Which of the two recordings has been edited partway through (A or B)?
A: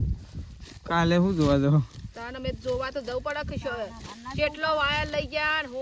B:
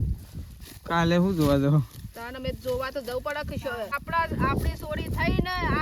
B